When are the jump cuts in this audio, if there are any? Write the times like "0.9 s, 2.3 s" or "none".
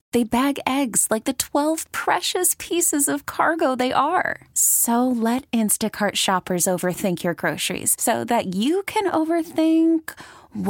none